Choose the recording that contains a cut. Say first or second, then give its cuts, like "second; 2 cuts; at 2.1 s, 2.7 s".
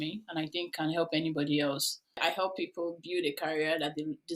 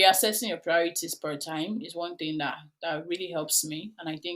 first; 1 cut; at 2.1 s